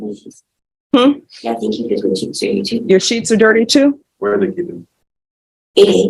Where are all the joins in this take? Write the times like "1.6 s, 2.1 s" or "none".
none